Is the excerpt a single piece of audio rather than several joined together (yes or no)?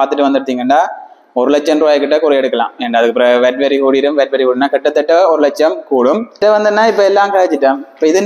no